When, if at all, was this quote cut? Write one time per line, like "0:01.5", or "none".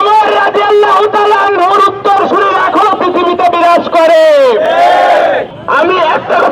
0:05.5